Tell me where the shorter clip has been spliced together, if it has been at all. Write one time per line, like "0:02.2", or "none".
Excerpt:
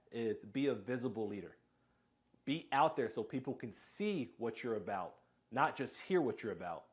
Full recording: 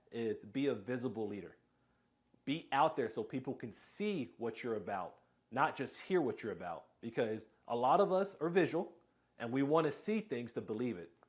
none